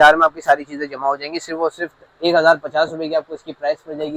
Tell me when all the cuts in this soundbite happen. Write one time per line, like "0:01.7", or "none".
none